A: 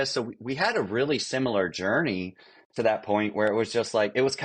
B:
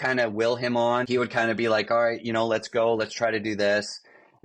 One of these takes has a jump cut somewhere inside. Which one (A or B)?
B